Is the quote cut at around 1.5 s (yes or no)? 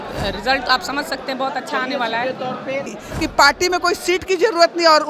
no